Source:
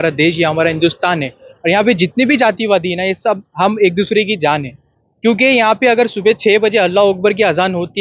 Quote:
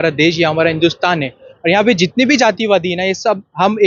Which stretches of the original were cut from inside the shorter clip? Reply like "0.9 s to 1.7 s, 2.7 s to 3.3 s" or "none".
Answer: none